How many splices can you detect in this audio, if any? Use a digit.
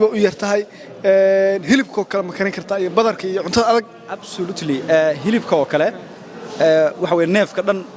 0